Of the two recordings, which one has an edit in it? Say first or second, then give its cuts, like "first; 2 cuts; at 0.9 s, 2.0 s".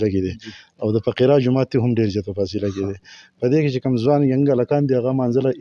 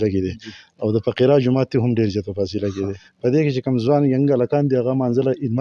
second; 1 cut; at 3.0 s